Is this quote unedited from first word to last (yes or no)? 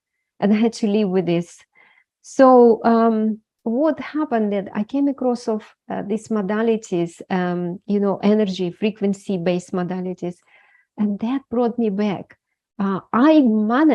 yes